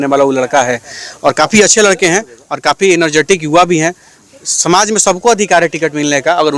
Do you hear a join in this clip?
no; 0 cuts

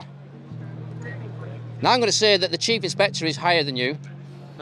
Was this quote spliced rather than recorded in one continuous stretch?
no; 0 cuts

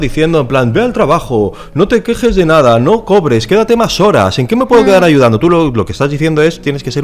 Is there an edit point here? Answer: no; 0 cuts

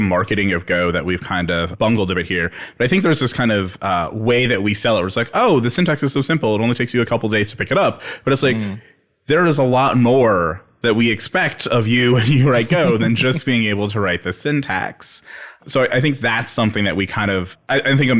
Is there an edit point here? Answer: no; 0 cuts

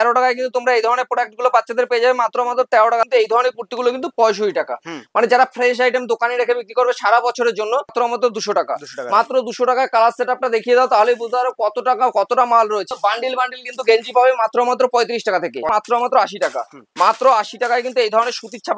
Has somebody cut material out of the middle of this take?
yes; 4 cuts; at 3.1 s, 7.9 s, 12.9 s, 15.7 s

